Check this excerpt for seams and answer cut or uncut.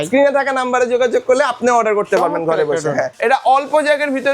cut